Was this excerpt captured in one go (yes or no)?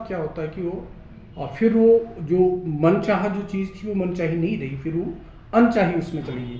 yes